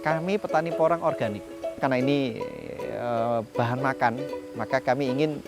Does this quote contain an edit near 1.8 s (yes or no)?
yes